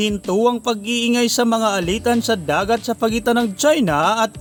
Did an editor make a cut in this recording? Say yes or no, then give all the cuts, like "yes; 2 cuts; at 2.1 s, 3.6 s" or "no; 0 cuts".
no; 0 cuts